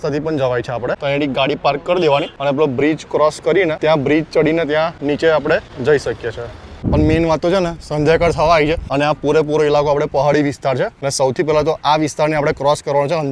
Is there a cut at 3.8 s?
yes; 8 cuts; at 1.0 s, 2.3 s, 3.8 s, 5.0 s, 5.7 s, 6.8 s, 8.8 s, 11.0 s

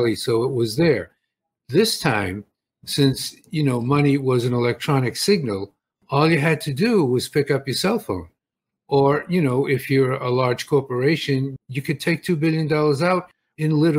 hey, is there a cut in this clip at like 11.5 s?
yes; 1 cut; at 11.5 s

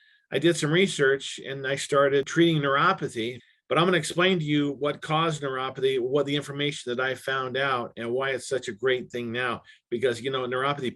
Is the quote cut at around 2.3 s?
yes; 2 cuts; at 2.3 s, 3.4 s

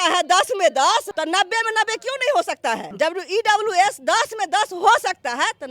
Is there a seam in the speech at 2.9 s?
yes; 2 cuts; at 1.1 s, 2.9 s

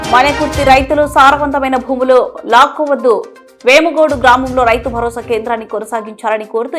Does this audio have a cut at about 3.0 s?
no; 0 cuts

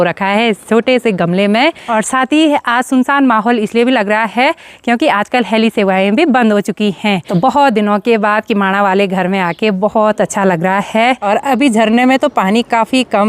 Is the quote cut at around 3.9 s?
no; 3 cuts; at 1.8 s, 7.3 s, 11.2 s

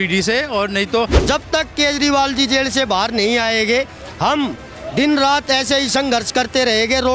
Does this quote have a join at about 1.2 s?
yes; 1 cut; at 1.2 s

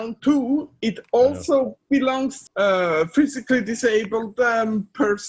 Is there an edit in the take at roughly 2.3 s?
yes; 1 cut; at 2.3 s

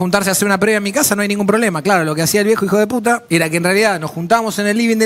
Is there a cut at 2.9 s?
no; 0 cuts

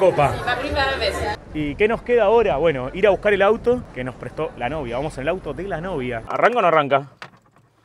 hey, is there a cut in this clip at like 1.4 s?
yes; 2 cuts; at 1.4 s, 6.2 s

